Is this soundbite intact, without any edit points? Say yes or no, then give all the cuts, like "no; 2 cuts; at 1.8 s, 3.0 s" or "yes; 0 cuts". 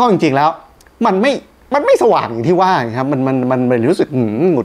yes; 0 cuts